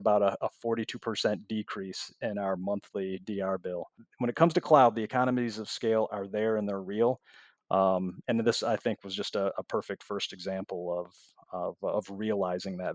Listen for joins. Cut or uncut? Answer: cut